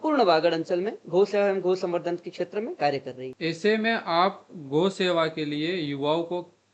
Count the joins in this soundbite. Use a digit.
1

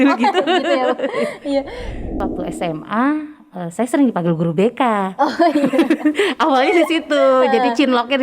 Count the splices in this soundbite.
1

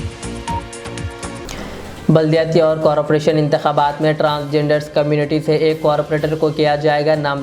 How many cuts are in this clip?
1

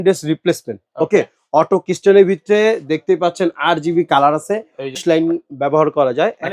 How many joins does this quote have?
1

